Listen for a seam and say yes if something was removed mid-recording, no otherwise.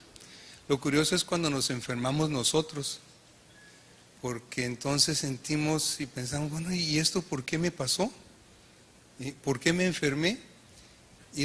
yes